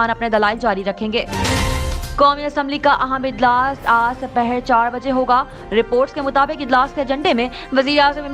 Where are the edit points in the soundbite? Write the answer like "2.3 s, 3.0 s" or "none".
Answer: 1.3 s

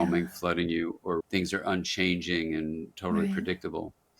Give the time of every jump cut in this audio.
1.2 s

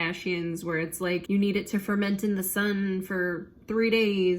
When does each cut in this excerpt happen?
1.2 s

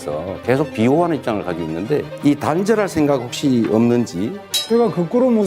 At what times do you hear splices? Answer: 4.4 s

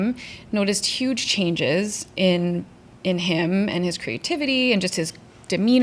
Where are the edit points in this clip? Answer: none

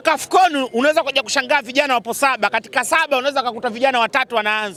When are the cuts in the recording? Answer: none

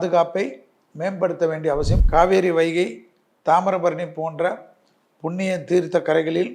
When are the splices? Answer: 2.0 s

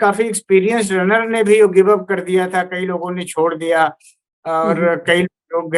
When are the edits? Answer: none

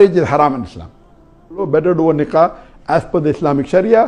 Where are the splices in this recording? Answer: 1.7 s

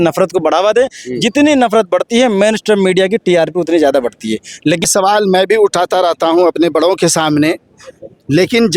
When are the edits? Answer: 4.9 s

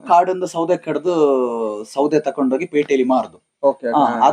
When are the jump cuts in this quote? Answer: none

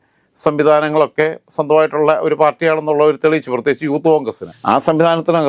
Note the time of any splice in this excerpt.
4.4 s

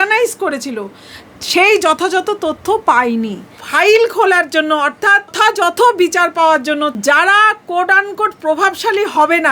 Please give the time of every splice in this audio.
3.6 s, 5.3 s, 6.9 s

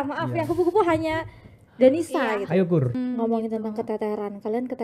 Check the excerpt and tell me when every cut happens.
3.0 s

